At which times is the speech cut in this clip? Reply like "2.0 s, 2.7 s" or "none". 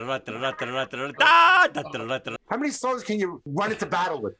2.3 s, 3.5 s